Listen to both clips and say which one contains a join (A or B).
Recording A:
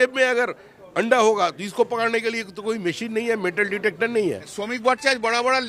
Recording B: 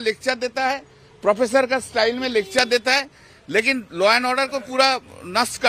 A